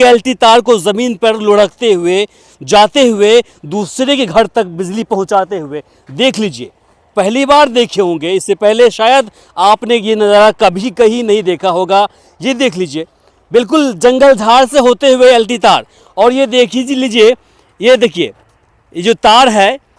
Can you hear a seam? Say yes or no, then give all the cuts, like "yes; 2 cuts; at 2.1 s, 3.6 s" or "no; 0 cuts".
no; 0 cuts